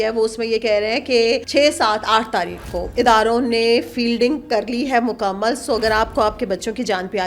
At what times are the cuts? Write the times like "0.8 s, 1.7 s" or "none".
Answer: 1.4 s, 2.8 s